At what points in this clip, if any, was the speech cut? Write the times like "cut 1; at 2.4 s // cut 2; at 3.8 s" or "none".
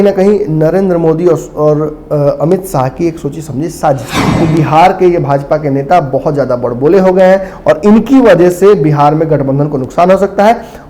cut 1; at 4.2 s

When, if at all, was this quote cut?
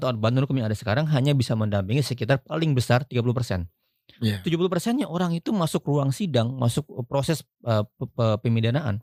none

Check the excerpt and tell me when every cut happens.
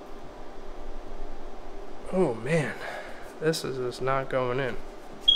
none

